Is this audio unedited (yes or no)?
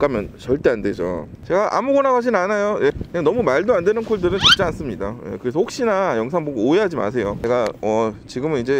no